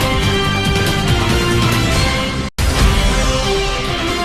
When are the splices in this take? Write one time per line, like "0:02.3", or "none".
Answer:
0:02.5